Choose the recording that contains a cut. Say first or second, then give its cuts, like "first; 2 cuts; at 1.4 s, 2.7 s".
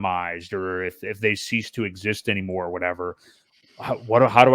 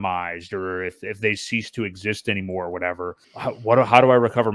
second; 1 cut; at 3.3 s